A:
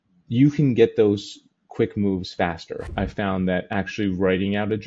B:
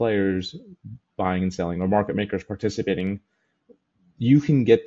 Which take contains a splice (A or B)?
A